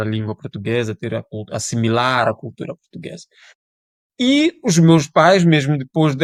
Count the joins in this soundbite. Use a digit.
0